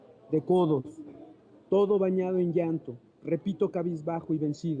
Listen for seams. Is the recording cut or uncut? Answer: cut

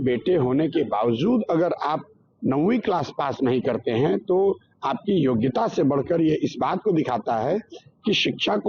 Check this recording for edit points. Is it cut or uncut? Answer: uncut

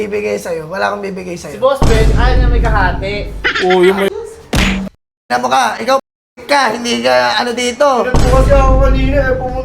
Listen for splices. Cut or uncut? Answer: cut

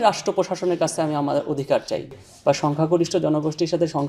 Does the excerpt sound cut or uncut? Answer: cut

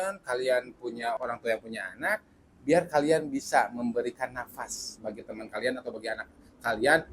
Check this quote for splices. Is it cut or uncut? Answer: cut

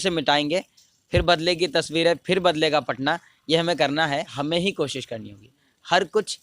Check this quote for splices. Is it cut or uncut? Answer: cut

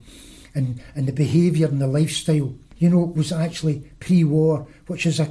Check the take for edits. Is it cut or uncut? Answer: cut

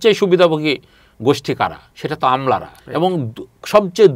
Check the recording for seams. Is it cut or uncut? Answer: cut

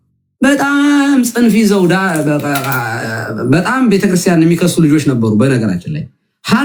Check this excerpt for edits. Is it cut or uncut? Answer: uncut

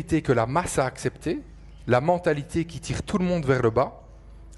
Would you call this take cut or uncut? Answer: uncut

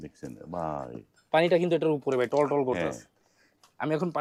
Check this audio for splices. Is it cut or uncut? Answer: uncut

